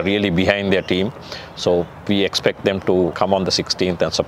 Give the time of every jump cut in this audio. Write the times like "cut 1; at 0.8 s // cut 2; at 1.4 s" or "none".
cut 1; at 3.1 s